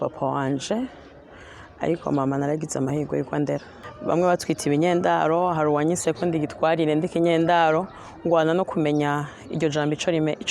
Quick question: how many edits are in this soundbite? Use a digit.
1